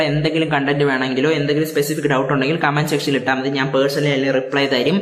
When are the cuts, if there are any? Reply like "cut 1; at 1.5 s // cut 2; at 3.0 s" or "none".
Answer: none